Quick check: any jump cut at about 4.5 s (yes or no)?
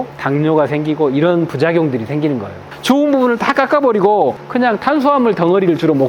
no